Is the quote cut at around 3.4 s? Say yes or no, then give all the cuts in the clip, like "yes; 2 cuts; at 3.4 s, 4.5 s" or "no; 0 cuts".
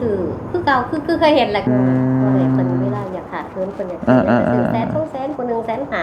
no; 1 cut; at 1.7 s